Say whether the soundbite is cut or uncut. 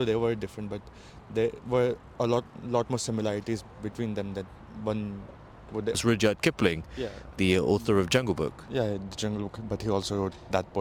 cut